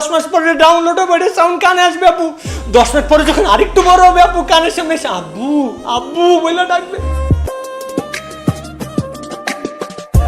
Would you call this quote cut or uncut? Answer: uncut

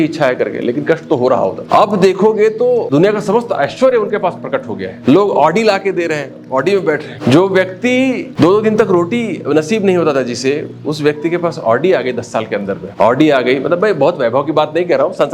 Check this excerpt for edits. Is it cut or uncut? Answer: cut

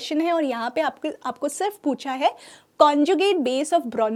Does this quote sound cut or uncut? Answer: uncut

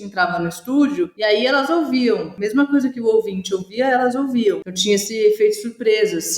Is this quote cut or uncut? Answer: cut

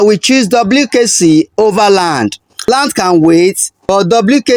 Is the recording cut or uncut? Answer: cut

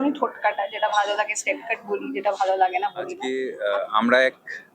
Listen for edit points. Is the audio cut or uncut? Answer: cut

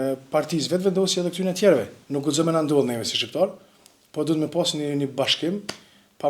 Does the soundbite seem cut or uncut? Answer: cut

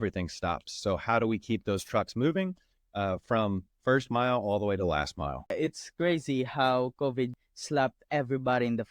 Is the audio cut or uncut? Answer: cut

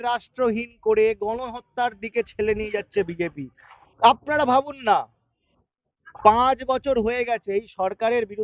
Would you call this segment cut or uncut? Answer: uncut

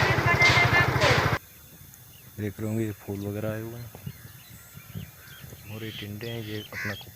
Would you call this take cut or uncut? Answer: cut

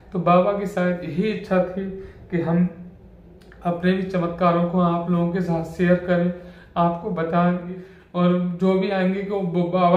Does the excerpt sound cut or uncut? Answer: cut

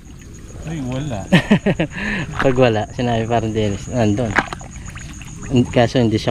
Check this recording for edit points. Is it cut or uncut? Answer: uncut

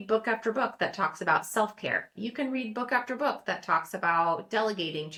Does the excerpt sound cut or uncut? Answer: uncut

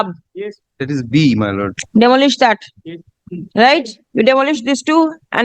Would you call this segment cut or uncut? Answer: cut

